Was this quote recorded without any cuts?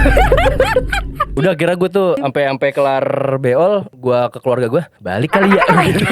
no; 4 cuts; at 1.3 s, 2.2 s, 3.9 s, 5.0 s

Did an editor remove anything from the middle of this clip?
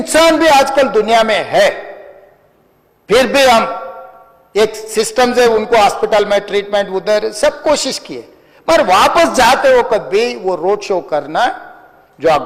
no; 0 cuts

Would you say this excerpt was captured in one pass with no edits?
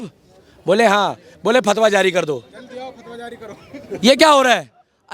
yes; 0 cuts

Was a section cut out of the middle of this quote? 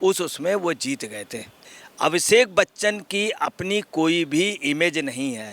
yes; 1 cut; at 1.6 s

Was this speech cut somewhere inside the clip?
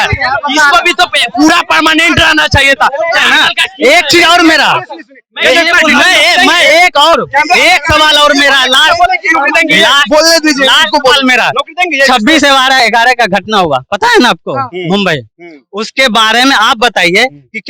no; 0 cuts

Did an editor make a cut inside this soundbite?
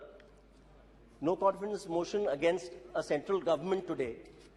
no; 0 cuts

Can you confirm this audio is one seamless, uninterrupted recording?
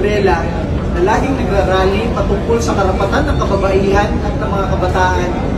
yes; 0 cuts

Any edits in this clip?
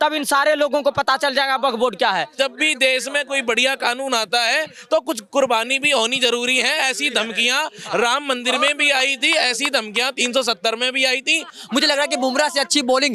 yes; 2 cuts; at 2.3 s, 11.6 s

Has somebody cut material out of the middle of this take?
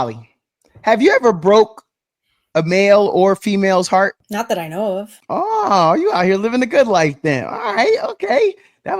yes; 2 cuts; at 4.2 s, 5.2 s

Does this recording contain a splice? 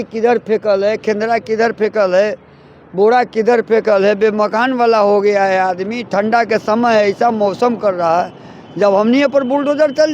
no; 0 cuts

